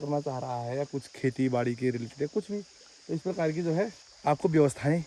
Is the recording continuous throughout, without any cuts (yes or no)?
no